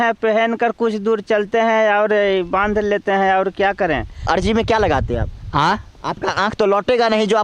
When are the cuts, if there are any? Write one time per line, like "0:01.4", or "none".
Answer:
0:04.3

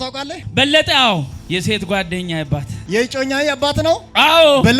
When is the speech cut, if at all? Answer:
0:01.4
0:02.7

